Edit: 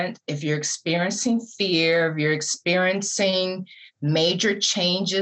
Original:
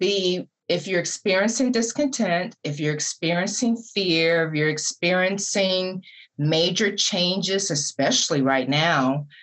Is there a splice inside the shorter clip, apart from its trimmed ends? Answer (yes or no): no